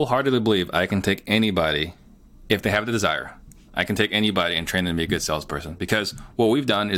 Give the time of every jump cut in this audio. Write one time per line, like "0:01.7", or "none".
none